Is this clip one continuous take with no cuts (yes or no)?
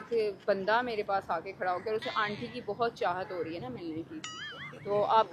yes